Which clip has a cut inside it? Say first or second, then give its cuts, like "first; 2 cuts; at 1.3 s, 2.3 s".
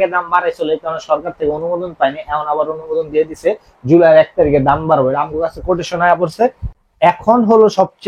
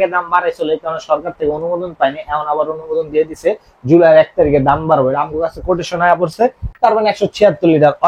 second; 1 cut; at 6.7 s